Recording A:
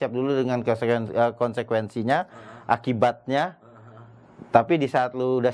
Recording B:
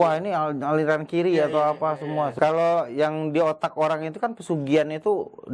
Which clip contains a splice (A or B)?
B